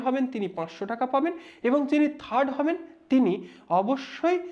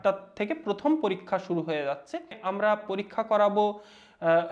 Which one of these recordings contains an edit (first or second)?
second